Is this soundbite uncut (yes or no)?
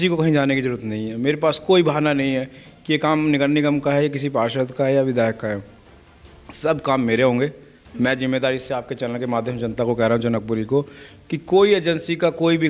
yes